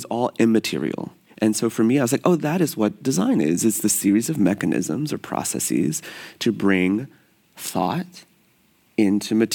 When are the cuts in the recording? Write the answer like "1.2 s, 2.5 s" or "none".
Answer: 1.2 s